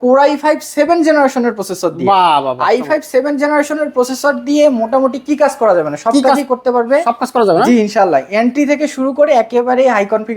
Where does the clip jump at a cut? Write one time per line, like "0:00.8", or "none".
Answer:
none